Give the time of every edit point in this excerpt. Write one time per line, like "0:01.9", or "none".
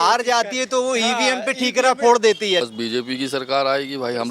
0:02.6